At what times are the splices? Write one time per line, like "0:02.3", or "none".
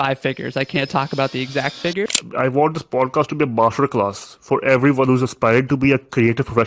0:01.9

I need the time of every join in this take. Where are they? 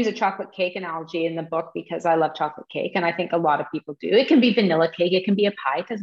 none

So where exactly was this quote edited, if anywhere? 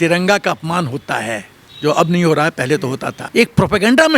0:03.1

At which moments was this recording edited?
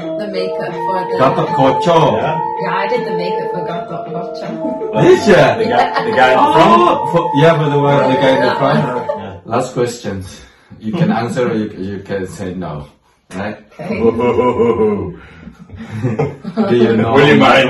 0:09.1

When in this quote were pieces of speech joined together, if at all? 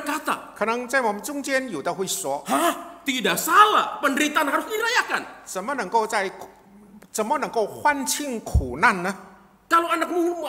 none

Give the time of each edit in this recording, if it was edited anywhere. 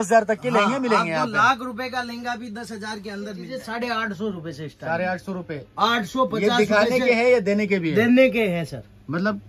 0:03.5

